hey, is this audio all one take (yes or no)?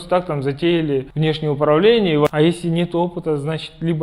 no